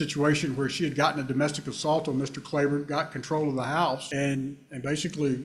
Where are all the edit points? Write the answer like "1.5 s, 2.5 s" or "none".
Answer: none